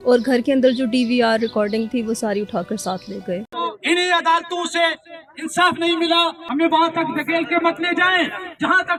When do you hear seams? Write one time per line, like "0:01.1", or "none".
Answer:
none